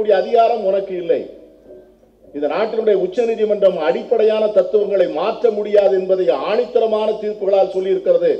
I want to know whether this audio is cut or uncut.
uncut